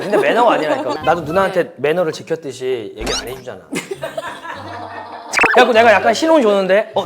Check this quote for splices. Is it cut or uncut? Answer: cut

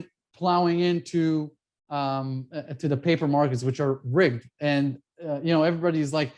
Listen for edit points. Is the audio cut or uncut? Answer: uncut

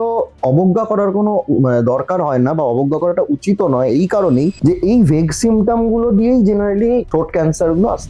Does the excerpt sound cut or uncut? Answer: uncut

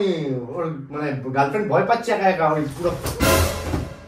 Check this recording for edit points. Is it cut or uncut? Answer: uncut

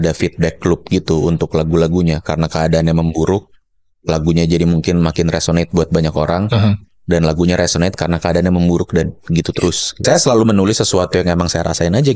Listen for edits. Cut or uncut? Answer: cut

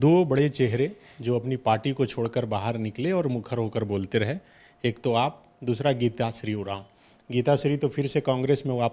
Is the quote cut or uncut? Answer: uncut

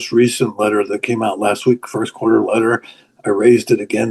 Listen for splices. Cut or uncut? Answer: uncut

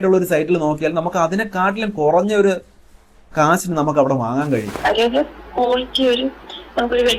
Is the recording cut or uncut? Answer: uncut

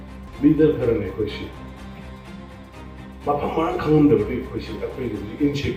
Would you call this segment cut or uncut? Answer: uncut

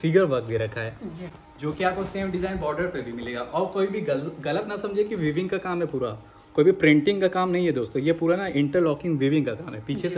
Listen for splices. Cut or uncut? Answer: uncut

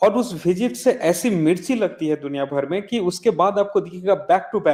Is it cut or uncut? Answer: uncut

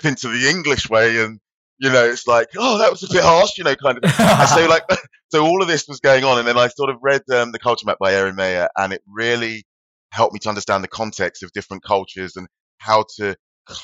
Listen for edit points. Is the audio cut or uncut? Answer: uncut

